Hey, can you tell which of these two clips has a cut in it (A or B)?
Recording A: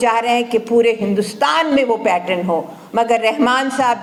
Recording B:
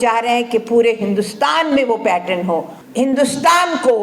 B